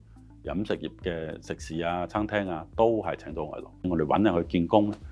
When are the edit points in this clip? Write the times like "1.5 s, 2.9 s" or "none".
3.8 s